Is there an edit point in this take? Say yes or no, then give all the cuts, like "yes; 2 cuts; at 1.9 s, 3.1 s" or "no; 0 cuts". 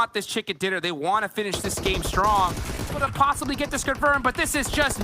yes; 1 cut; at 3.0 s